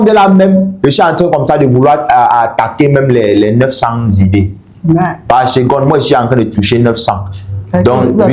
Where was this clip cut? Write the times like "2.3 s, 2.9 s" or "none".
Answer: none

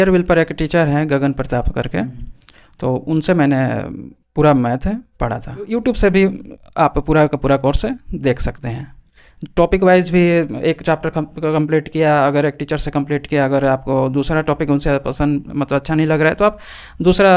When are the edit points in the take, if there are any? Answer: 5.7 s

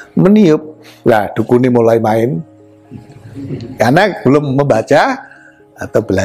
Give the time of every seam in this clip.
none

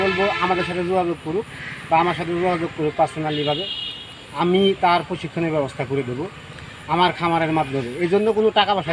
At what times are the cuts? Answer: none

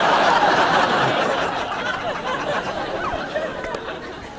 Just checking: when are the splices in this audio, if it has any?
none

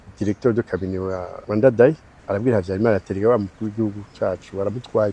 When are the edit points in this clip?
1.3 s, 2.1 s

